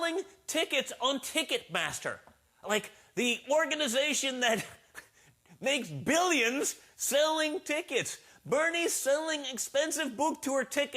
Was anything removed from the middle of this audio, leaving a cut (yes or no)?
yes